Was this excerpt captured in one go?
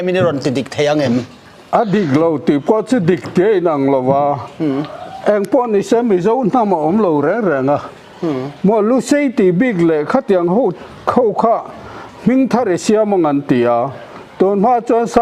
no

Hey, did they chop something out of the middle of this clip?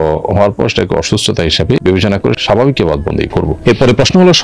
yes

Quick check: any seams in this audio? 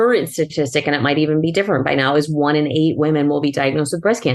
no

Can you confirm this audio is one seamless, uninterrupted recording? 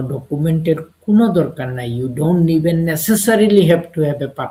yes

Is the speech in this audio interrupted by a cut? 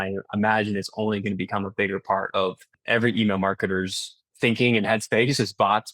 yes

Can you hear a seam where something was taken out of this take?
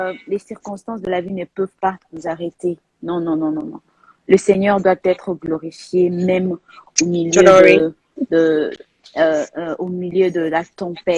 no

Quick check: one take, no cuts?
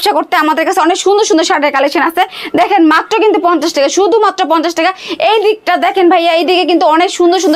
yes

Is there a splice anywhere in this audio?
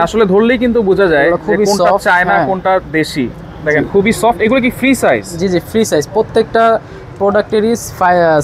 no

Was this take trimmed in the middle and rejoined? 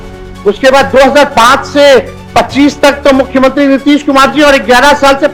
no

